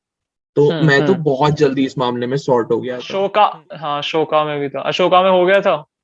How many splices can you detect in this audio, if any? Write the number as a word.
one